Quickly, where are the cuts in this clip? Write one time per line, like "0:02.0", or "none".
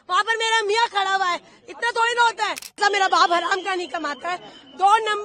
0:02.8